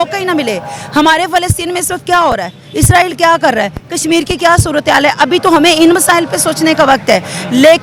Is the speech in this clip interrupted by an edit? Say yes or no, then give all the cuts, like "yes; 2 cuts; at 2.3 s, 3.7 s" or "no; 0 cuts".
no; 0 cuts